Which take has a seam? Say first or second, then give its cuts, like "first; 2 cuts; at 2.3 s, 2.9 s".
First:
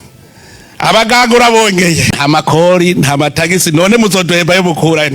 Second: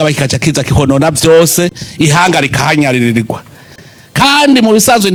first; 1 cut; at 2.2 s